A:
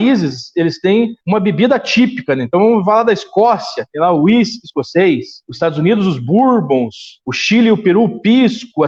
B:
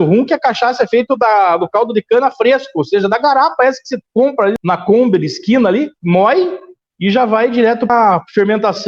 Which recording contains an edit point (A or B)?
B